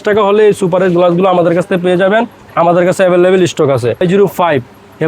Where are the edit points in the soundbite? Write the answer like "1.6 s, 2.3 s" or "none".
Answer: 4.0 s